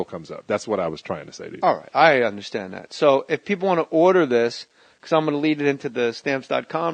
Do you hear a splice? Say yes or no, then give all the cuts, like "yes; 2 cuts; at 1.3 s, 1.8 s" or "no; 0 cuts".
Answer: no; 0 cuts